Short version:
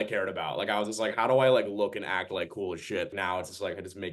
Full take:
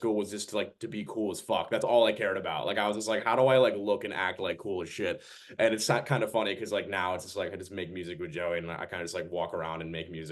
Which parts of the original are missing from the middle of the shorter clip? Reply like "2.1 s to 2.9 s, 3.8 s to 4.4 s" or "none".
5.2 s to 6.9 s